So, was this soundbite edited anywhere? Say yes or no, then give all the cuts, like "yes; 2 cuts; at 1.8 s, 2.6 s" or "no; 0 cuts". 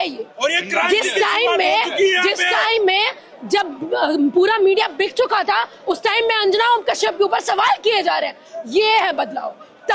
no; 0 cuts